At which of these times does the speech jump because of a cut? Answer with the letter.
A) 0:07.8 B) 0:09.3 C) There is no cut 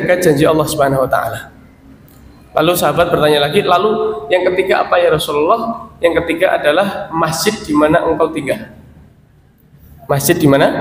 C